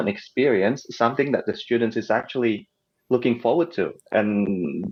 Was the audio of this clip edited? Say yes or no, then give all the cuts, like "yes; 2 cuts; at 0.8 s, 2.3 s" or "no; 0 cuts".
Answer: no; 0 cuts